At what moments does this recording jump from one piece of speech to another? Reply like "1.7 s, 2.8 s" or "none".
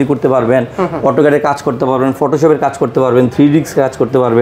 none